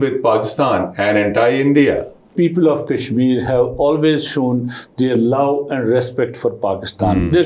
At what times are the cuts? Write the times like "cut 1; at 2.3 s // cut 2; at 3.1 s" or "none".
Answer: cut 1; at 2.3 s